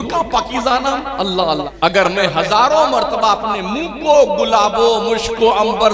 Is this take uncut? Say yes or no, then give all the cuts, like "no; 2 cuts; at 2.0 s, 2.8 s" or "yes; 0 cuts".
no; 1 cut; at 1.7 s